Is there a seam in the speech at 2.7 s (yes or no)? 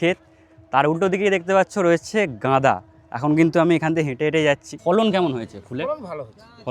no